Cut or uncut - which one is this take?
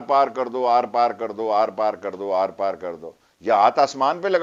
uncut